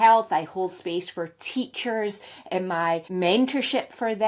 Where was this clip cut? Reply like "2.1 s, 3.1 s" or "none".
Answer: 3.1 s